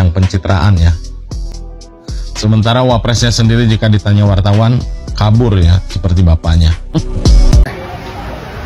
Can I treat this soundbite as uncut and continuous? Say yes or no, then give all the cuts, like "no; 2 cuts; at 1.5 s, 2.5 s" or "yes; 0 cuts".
yes; 0 cuts